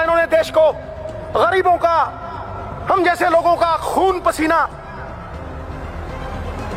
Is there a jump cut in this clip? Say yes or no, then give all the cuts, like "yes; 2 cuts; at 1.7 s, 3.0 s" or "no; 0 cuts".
no; 0 cuts